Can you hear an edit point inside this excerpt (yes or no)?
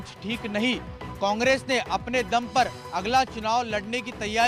no